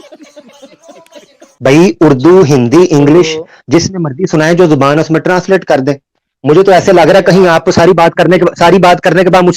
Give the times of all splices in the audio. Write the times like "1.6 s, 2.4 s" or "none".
1.6 s